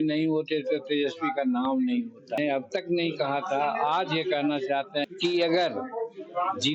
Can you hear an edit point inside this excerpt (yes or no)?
yes